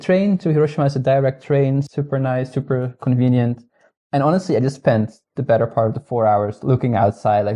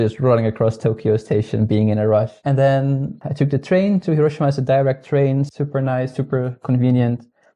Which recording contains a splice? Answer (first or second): second